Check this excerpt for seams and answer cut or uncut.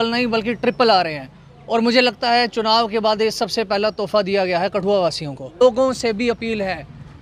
cut